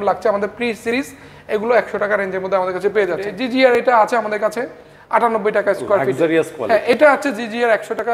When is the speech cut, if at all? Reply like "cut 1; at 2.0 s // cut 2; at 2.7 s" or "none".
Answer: cut 1; at 3.3 s